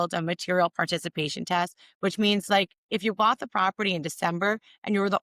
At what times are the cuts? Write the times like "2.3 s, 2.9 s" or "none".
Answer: none